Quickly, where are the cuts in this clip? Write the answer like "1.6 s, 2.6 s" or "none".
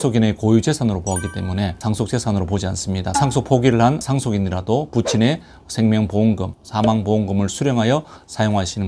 1.8 s, 3.1 s